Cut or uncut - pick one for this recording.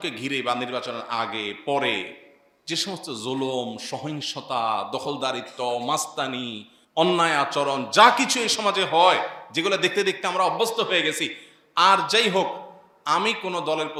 uncut